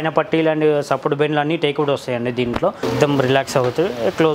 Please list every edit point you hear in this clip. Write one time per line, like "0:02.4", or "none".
0:02.8